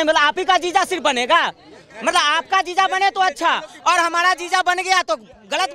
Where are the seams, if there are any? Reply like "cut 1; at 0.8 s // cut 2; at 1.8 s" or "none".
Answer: none